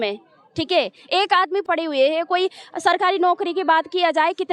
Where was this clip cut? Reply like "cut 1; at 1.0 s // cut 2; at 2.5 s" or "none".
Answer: cut 1; at 1.6 s